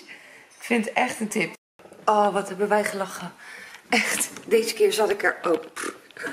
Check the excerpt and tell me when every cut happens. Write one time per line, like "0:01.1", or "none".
0:01.6